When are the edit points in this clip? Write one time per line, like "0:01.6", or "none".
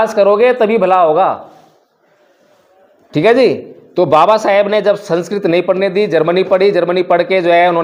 none